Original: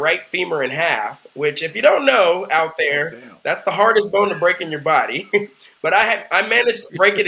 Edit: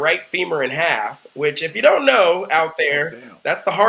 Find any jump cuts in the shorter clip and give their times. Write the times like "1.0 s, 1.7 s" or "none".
none